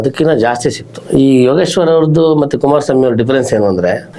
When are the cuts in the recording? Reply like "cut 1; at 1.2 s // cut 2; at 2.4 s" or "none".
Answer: cut 1; at 0.9 s